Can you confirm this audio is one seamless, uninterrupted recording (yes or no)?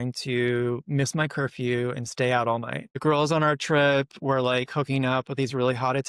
no